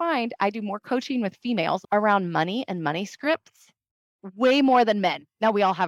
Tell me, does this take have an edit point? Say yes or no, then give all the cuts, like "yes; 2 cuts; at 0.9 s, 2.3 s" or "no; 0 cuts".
yes; 1 cut; at 1.8 s